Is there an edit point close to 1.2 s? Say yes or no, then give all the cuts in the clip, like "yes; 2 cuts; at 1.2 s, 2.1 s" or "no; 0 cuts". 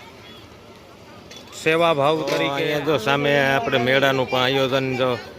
no; 1 cut; at 2.5 s